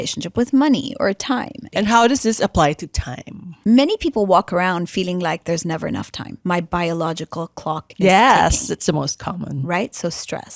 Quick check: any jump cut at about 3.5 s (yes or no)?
yes